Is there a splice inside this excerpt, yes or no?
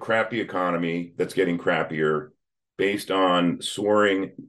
no